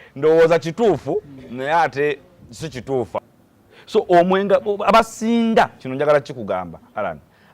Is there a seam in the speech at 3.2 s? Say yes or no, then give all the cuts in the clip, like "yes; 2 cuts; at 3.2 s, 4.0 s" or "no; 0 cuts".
yes; 1 cut; at 3.2 s